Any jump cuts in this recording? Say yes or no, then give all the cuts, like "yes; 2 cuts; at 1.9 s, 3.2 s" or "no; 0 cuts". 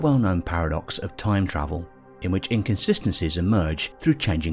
no; 0 cuts